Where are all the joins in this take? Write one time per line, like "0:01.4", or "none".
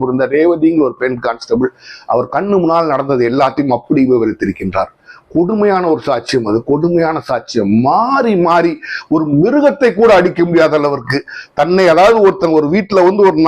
none